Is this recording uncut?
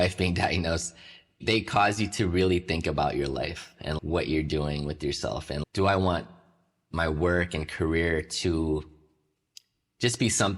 no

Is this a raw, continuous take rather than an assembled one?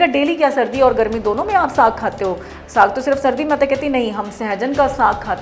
yes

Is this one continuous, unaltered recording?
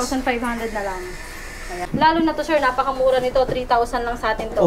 no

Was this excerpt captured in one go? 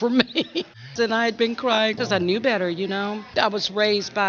no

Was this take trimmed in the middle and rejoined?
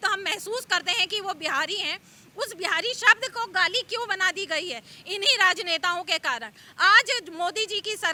no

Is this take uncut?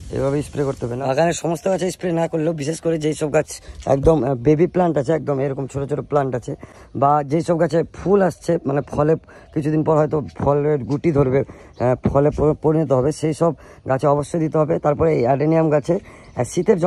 no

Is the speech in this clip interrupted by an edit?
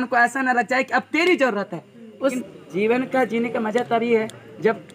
yes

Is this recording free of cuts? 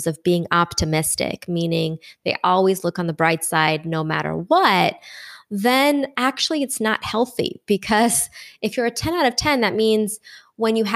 yes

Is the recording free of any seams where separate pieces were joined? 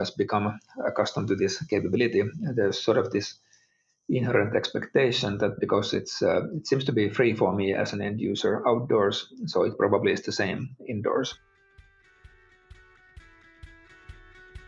no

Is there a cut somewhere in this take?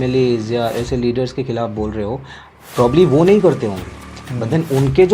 no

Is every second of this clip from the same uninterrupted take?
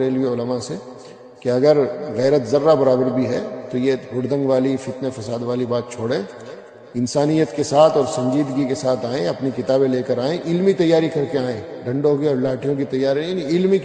yes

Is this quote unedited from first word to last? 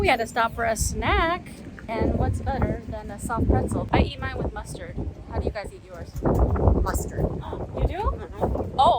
no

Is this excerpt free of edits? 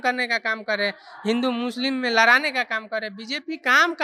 yes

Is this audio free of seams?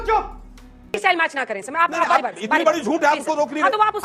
no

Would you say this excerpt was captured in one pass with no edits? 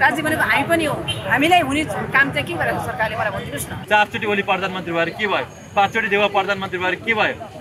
no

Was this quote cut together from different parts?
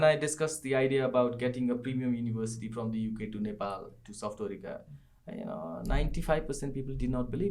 no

